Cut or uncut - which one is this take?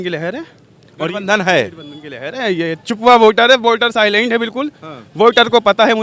uncut